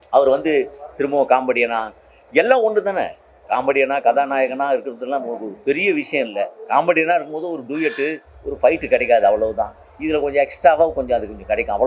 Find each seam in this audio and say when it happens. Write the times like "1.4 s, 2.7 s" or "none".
none

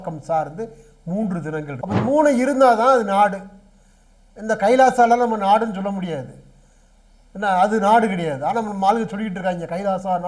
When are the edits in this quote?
1.8 s

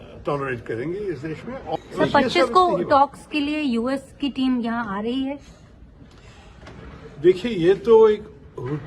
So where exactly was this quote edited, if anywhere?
1.8 s

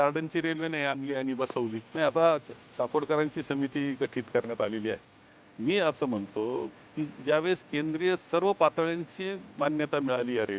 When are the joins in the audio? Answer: 1.8 s

